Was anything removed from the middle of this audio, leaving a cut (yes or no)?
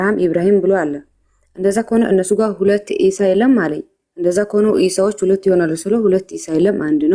no